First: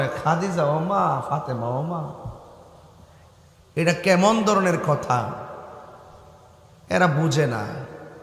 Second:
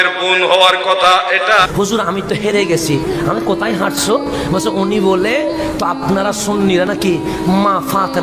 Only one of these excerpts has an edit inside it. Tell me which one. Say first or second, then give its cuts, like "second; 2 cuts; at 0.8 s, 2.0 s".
second; 1 cut; at 1.7 s